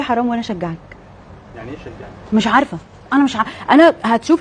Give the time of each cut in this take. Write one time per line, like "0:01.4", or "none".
none

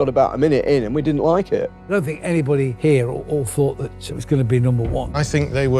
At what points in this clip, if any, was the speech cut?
0:01.8
0:02.7
0:05.1

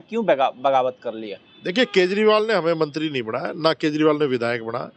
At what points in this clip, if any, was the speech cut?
none

